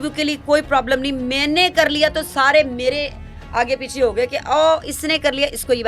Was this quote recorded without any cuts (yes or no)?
yes